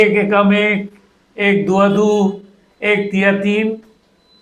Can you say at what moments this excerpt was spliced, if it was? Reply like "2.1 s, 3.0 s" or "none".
none